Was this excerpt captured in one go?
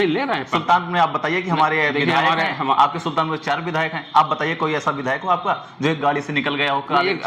yes; 0 cuts

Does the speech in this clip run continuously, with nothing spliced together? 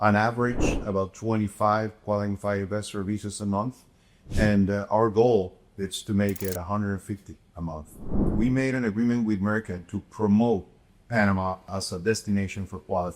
no; 2 cuts; at 8.3 s, 11.6 s

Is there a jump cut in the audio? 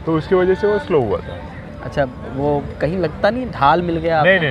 no; 0 cuts

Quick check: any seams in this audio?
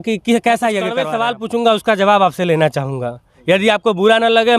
yes; 1 cut; at 1.1 s

